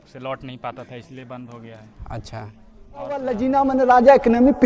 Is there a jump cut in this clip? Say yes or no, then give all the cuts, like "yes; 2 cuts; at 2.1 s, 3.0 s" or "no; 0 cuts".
yes; 1 cut; at 3.2 s